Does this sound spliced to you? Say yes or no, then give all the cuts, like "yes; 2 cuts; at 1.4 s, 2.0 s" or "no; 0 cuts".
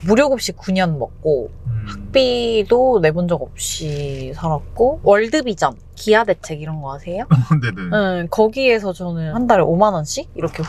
no; 0 cuts